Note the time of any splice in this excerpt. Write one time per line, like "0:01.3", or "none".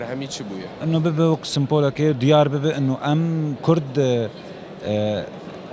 none